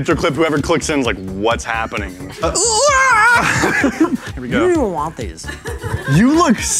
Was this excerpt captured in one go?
no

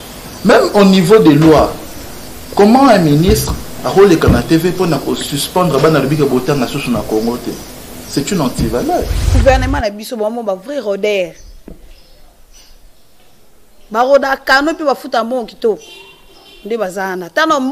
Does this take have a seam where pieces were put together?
yes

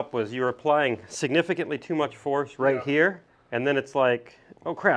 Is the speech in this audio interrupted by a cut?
no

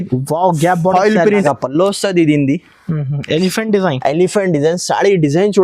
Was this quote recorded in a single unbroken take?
no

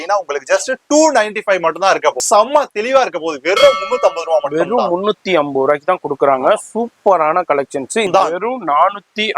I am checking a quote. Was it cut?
yes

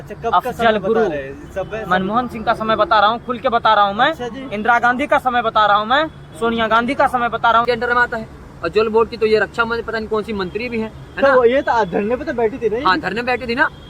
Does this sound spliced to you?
yes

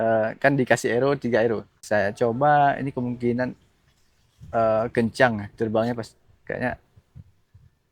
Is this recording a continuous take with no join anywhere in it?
no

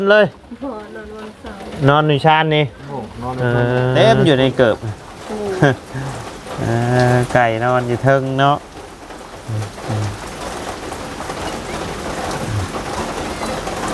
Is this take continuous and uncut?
no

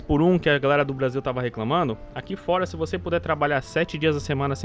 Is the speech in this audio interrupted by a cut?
no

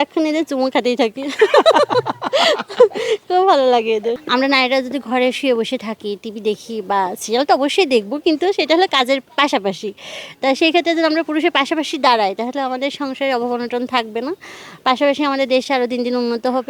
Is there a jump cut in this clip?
yes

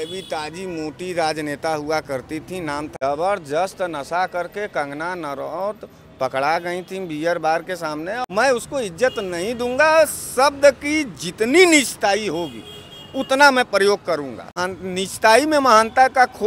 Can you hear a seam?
yes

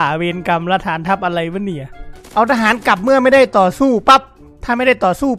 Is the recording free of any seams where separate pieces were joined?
no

